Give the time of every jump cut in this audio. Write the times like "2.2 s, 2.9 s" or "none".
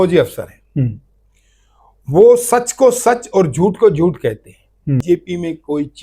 5.0 s